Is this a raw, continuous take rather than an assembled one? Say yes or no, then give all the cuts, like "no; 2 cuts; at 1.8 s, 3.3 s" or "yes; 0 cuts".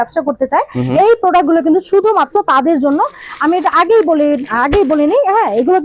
yes; 0 cuts